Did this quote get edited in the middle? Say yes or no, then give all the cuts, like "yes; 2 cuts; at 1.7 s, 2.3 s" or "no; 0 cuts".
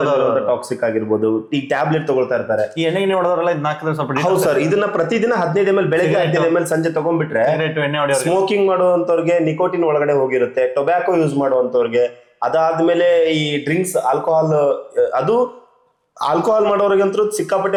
no; 0 cuts